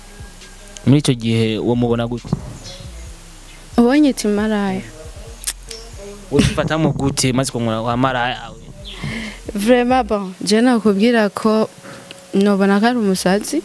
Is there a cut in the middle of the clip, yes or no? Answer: no